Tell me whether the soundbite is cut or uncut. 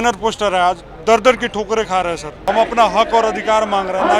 cut